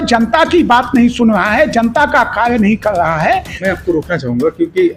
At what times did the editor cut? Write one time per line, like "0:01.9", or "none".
0:03.6